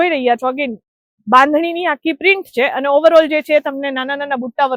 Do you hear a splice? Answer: no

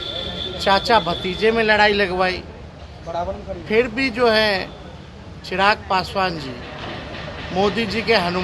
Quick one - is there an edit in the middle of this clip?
no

